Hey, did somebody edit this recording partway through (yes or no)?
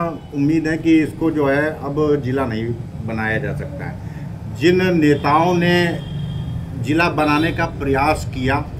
no